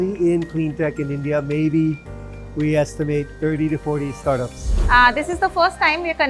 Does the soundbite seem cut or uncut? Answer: cut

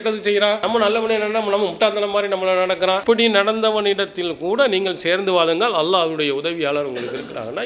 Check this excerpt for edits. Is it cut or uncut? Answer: uncut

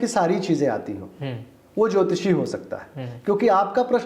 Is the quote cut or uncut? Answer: uncut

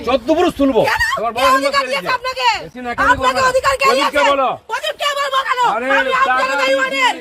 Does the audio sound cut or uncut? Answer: uncut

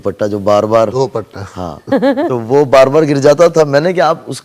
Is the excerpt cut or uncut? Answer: uncut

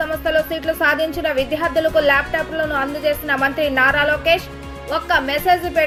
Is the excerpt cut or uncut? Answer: uncut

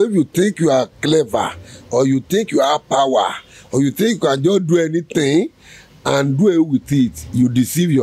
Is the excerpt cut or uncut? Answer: uncut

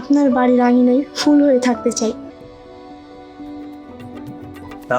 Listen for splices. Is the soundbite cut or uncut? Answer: cut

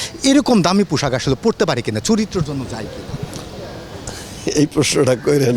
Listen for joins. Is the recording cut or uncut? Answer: uncut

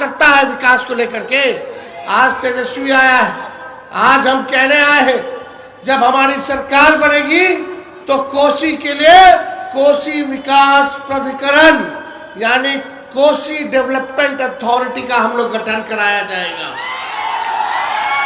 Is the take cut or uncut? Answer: uncut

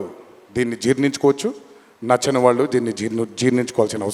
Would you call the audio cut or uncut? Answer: uncut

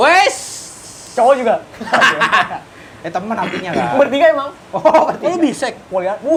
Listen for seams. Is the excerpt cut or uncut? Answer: uncut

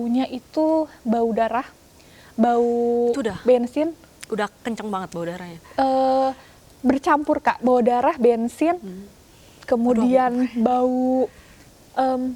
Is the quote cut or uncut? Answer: uncut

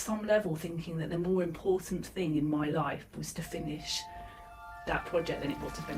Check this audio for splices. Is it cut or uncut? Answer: uncut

